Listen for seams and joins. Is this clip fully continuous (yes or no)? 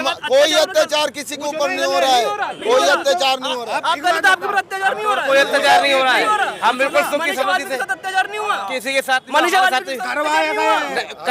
yes